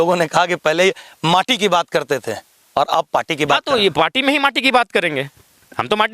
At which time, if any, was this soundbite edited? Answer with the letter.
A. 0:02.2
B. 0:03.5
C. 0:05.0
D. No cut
D